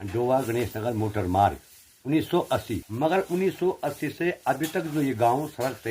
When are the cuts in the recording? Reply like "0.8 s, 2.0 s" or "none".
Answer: 2.8 s